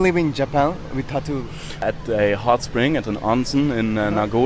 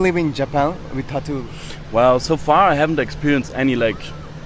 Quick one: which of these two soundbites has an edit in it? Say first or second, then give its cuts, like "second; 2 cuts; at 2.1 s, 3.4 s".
first; 1 cut; at 1.8 s